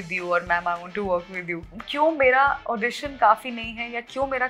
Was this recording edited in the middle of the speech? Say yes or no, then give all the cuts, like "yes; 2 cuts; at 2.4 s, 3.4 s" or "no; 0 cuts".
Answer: yes; 1 cut; at 1.8 s